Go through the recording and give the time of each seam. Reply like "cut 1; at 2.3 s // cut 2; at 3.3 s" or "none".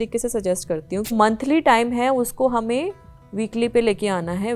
cut 1; at 1.1 s